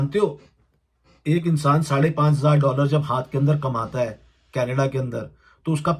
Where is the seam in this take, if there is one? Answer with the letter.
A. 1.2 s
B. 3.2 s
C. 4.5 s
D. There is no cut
D